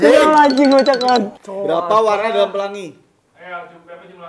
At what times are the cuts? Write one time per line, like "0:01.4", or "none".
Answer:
0:01.4